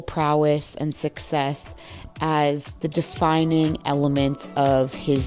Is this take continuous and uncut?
yes; 0 cuts

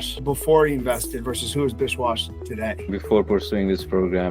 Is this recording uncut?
no; 1 cut; at 2.9 s

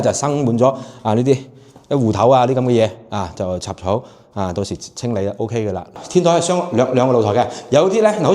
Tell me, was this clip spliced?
yes; 1 cut; at 5.9 s

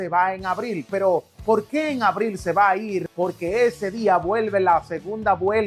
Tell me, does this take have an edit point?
yes; 1 cut; at 3.1 s

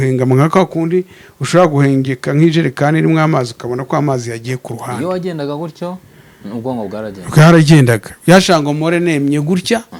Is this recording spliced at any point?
no; 0 cuts

